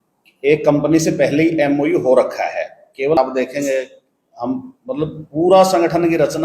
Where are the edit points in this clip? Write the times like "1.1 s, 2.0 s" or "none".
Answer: 3.2 s